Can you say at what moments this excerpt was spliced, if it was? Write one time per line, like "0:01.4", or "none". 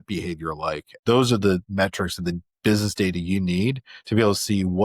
0:00.9
0:01.6